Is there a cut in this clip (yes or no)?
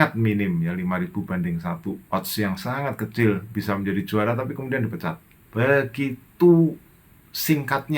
yes